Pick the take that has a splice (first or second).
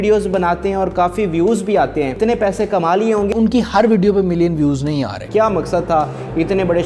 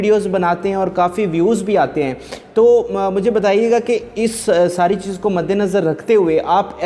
first